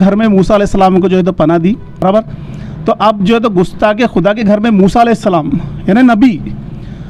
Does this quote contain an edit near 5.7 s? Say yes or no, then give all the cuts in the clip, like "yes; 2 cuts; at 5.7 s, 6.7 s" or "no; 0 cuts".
no; 1 cut; at 2.0 s